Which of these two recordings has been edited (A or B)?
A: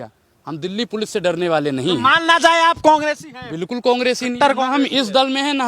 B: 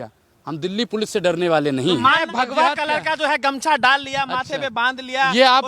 B